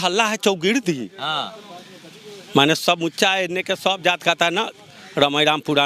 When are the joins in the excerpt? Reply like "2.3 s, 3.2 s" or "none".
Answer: none